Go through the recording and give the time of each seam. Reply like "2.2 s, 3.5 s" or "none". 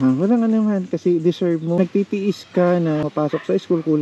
1.8 s, 3.0 s